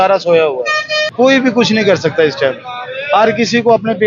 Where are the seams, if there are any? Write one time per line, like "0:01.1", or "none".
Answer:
0:01.0